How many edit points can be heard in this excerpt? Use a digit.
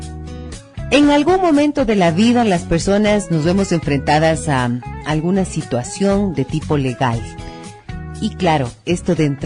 1